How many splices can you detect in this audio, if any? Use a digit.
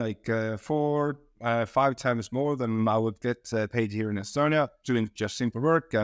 0